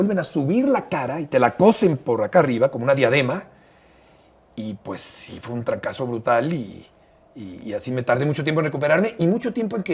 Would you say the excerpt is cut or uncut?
uncut